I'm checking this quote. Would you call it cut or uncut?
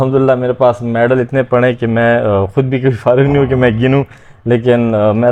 uncut